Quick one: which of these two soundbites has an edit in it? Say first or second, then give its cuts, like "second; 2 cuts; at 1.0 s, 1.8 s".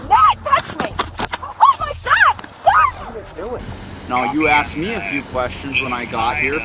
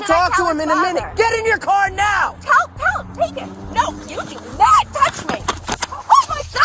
first; 1 cut; at 3.6 s